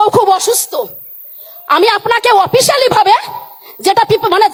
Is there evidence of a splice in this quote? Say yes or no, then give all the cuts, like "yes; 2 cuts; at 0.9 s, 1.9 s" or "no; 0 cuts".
no; 0 cuts